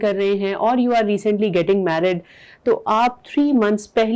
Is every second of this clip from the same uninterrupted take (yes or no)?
yes